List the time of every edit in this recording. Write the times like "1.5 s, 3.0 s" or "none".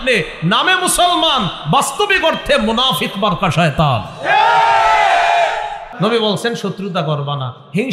5.8 s